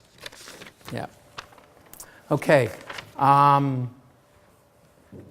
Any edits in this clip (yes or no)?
yes